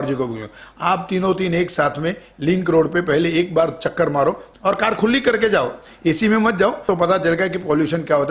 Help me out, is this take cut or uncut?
cut